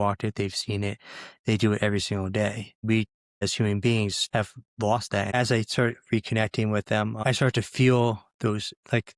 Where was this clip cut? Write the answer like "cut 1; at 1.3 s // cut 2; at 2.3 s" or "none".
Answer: cut 1; at 2.9 s // cut 2; at 4.2 s // cut 3; at 5.3 s // cut 4; at 7.2 s